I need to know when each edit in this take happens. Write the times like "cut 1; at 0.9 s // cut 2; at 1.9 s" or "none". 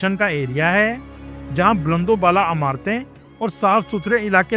none